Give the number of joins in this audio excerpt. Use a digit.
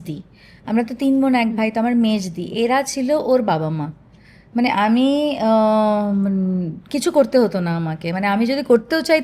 0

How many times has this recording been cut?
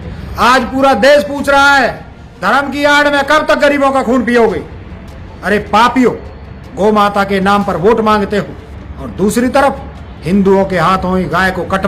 0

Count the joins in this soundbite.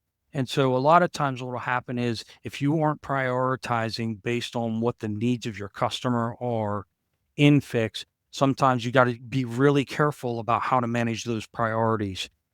1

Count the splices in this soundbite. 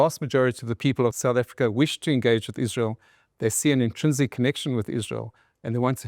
1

